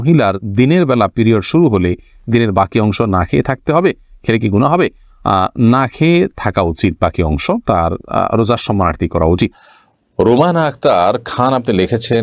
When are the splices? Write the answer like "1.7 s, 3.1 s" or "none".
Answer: none

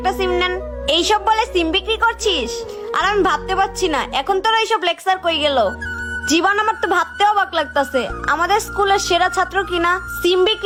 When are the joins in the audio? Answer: none

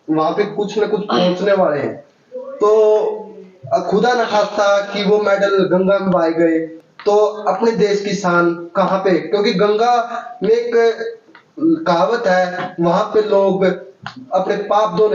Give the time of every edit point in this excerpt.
none

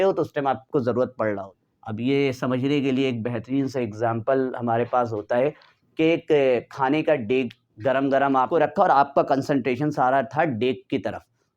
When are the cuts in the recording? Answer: 1.5 s, 8.5 s

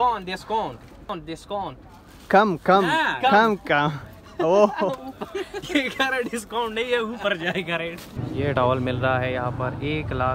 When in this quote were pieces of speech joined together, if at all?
1.1 s, 8.6 s

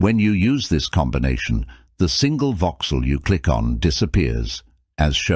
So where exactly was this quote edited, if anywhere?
none

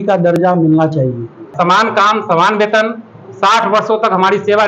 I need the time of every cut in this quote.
1.5 s

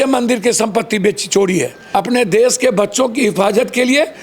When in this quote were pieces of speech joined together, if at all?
1.8 s

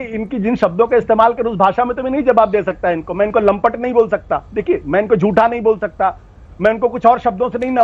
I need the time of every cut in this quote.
none

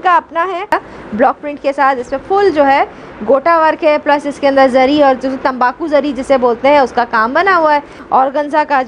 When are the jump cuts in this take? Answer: 0.7 s, 8.0 s

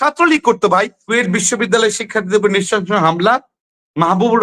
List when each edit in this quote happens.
1.0 s

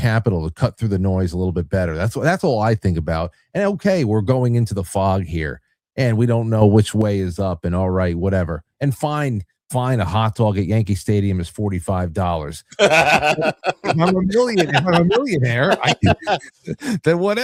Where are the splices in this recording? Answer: none

